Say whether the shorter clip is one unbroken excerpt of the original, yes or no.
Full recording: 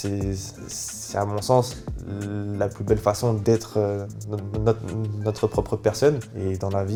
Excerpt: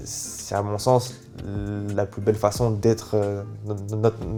yes